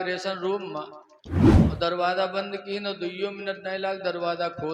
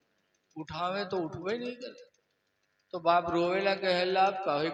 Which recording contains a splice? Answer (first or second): first